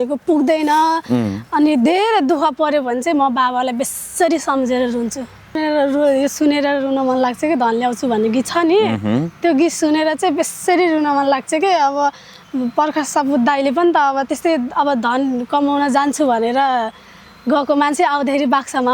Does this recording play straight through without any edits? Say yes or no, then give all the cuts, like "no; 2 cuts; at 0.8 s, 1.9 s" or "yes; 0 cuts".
no; 1 cut; at 5.6 s